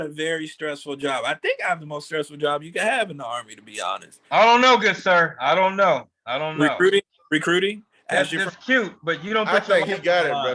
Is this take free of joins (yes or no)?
yes